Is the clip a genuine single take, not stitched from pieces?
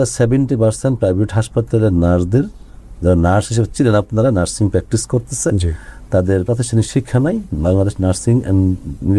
yes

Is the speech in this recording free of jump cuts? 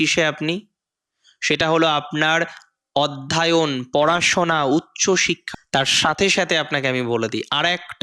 no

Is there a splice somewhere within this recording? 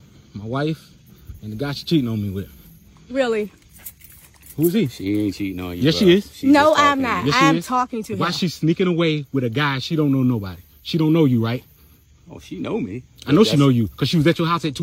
no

